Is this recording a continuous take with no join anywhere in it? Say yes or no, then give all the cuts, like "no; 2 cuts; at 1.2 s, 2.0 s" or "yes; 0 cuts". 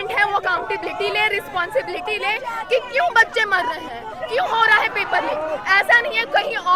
yes; 0 cuts